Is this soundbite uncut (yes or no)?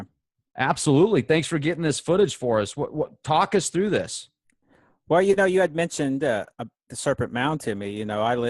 yes